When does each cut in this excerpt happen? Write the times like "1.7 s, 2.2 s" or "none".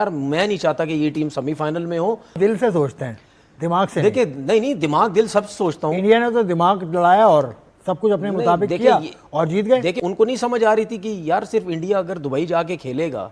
2.4 s, 10.0 s